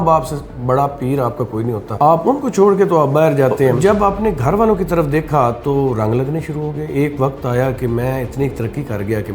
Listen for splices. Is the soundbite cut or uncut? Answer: cut